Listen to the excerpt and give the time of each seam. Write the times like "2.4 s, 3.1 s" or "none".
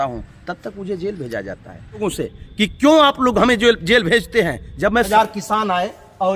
2.0 s, 5.1 s